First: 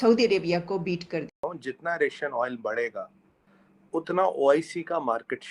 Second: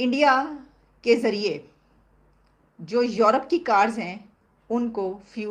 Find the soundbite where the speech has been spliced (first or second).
first